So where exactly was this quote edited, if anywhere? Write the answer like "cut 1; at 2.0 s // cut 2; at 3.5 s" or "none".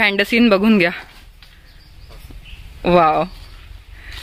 none